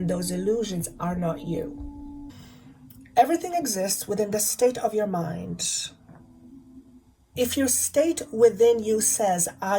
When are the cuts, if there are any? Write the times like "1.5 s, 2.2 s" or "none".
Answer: 2.3 s